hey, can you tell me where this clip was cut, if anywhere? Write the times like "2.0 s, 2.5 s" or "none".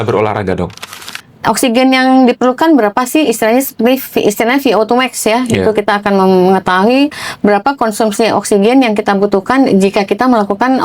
1.1 s